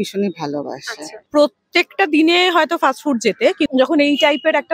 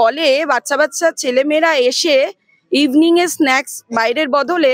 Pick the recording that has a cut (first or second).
first